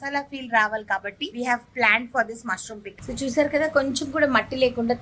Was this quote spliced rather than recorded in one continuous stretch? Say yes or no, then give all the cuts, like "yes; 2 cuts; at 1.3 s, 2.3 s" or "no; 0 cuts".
yes; 2 cuts; at 1.2 s, 2.9 s